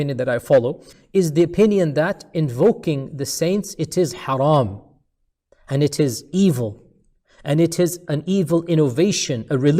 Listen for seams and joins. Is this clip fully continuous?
no; 1 cut; at 0.9 s

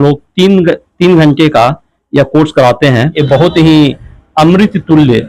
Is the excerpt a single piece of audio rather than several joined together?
no; 1 cut; at 3.2 s

